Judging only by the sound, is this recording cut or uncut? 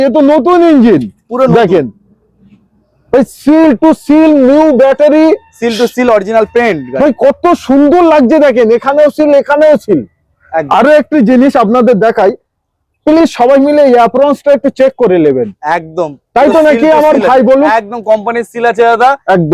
uncut